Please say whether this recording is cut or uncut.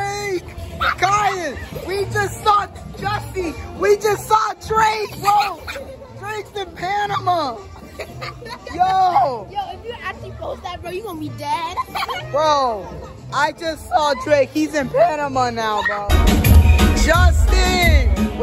cut